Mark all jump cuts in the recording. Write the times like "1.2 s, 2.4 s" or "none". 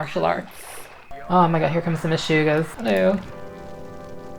1.0 s, 2.7 s